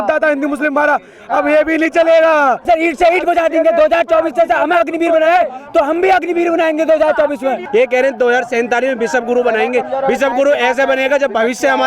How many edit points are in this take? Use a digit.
2